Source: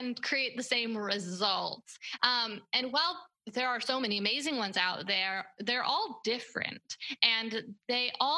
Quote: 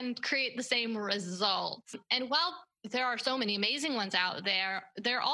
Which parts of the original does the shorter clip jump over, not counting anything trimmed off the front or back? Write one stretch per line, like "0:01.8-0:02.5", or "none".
0:02.0-0:02.6